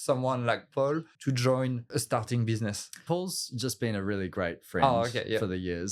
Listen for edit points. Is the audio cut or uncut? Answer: cut